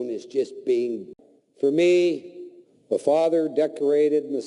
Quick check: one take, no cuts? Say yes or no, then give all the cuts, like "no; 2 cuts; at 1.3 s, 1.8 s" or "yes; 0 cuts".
yes; 0 cuts